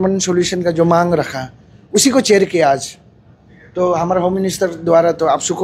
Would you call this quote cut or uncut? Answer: uncut